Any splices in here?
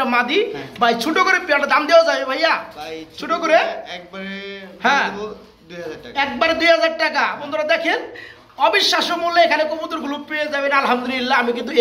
no; 0 cuts

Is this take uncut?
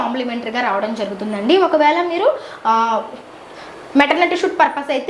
yes; 0 cuts

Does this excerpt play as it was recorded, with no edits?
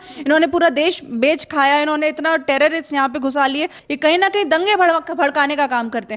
no; 1 cut; at 3.8 s

